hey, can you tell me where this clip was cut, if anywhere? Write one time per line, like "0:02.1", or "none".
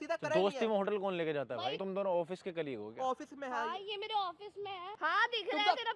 0:01.8
0:04.9